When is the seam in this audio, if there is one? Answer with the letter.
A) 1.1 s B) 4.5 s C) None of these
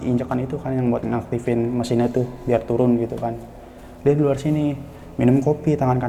C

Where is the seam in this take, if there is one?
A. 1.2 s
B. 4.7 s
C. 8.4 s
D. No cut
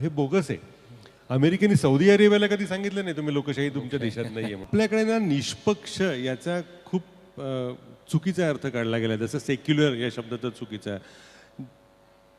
B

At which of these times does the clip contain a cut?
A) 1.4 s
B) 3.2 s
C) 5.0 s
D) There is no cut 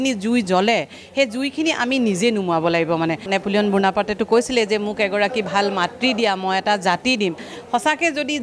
B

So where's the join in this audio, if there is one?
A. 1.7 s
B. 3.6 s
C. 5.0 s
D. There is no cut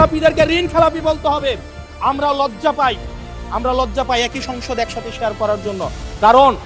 D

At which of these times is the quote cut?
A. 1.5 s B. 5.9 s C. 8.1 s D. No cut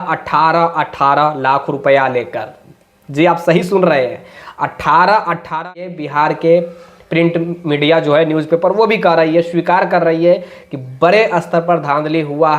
B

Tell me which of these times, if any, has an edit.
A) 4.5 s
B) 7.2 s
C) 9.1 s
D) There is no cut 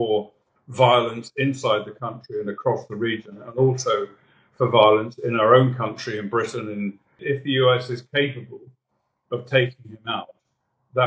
B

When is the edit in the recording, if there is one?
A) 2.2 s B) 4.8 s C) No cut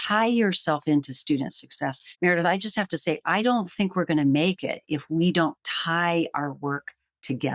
A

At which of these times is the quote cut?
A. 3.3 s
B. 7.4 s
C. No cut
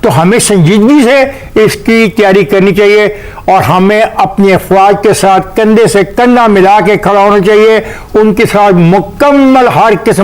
C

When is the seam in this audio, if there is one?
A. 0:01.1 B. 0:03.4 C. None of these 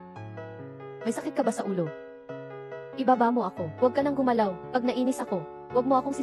A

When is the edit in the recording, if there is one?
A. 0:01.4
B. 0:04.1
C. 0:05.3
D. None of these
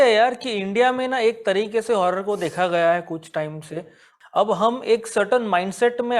B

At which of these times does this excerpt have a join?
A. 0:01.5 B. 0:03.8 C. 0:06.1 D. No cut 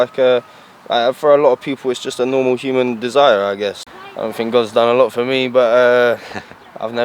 B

